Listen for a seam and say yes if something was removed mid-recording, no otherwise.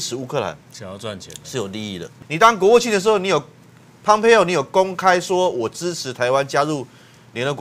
yes